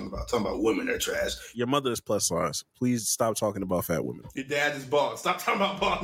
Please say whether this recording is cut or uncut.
cut